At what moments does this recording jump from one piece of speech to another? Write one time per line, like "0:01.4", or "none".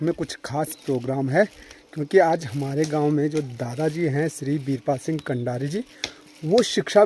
none